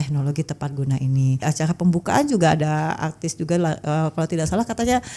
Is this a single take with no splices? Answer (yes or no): no